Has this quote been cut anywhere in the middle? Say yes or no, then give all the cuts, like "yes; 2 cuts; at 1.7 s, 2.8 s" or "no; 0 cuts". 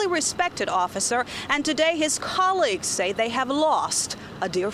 no; 0 cuts